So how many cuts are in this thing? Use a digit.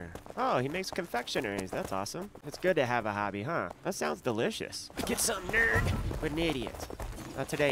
1